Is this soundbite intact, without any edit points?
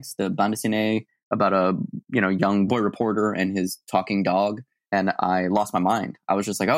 no; 2 cuts; at 2.7 s, 4.7 s

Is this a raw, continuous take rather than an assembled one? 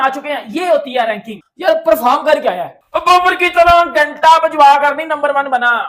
yes; 0 cuts

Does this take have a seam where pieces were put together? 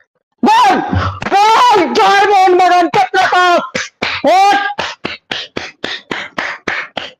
no; 0 cuts

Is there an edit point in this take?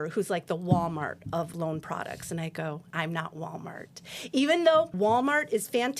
yes; 3 cuts; at 1.5 s, 2.8 s, 4.9 s

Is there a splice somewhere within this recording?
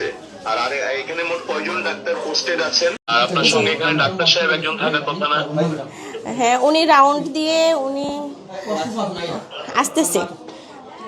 yes; 1 cut; at 3.1 s

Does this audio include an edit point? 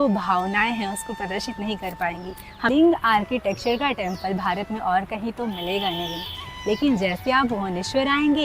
yes; 1 cut; at 2.7 s

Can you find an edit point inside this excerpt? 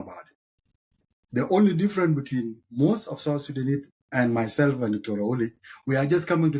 no; 0 cuts

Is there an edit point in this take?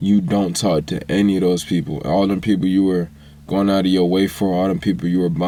no; 0 cuts

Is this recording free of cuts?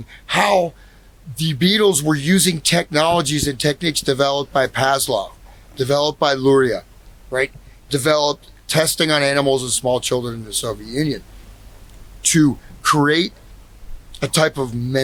yes; 0 cuts

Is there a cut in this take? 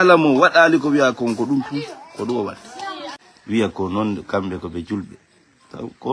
yes; 1 cut; at 3.0 s

